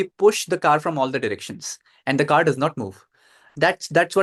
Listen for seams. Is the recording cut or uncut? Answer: uncut